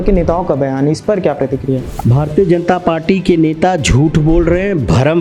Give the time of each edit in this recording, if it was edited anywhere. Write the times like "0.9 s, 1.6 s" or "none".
1.9 s